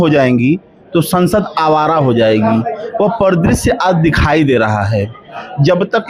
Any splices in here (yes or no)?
no